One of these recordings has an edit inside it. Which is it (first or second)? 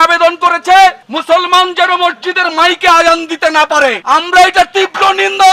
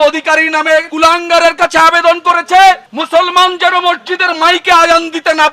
second